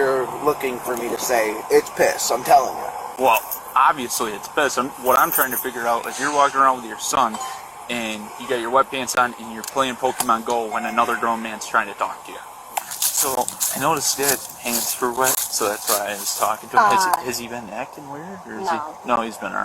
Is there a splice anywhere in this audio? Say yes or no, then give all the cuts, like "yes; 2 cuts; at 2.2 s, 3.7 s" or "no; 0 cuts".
yes; 1 cut; at 12.6 s